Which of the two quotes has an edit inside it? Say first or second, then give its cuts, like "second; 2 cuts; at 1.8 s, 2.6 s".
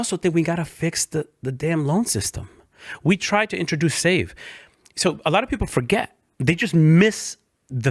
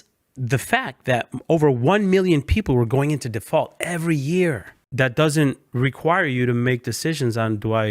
second; 2 cuts; at 4.8 s, 5.6 s